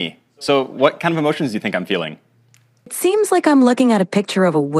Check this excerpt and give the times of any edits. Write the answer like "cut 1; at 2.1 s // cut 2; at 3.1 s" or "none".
cut 1; at 2.9 s